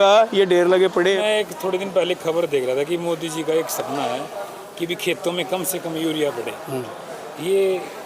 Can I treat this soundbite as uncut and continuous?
no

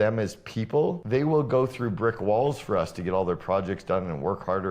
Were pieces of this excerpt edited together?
yes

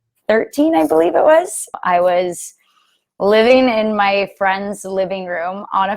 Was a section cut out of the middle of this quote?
yes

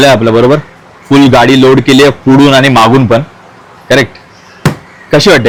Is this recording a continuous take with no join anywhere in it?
yes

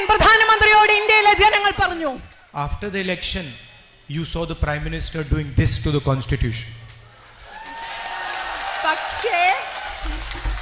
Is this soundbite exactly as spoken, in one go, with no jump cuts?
no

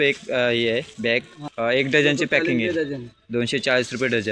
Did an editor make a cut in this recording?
no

